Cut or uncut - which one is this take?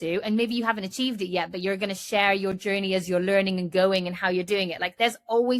uncut